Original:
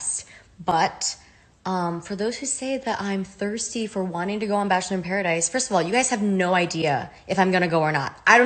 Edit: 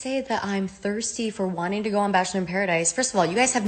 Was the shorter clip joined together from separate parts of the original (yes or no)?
no